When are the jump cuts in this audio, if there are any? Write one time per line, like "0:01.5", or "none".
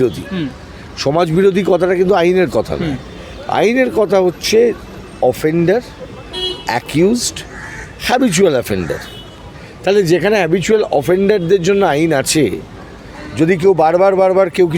none